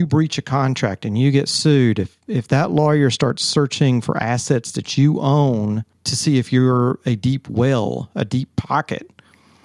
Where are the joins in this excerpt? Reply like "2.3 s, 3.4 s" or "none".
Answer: none